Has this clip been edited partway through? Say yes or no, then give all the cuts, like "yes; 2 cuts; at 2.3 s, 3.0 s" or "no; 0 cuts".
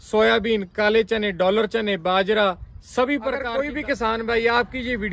yes; 1 cut; at 3.5 s